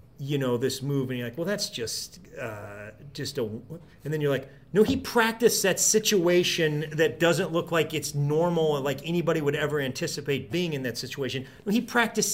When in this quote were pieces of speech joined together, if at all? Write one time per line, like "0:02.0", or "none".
none